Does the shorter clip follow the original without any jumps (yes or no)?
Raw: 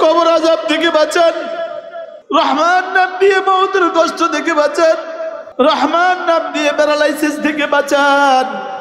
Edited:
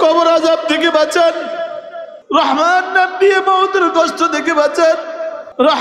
yes